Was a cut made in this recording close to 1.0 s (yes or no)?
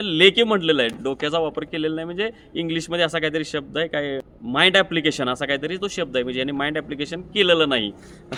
no